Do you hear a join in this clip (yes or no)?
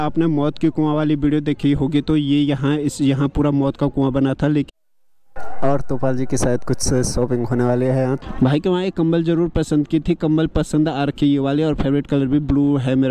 yes